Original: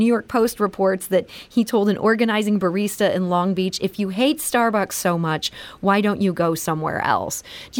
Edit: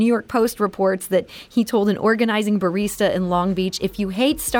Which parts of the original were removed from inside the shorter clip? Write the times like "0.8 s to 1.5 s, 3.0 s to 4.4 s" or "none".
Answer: none